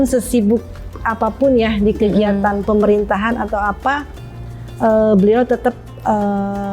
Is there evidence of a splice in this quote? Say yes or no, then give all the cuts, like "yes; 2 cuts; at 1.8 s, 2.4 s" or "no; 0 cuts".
no; 0 cuts